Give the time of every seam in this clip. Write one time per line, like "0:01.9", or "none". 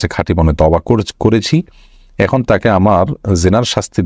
none